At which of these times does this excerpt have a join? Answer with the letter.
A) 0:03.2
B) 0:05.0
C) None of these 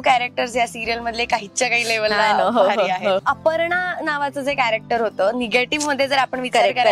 A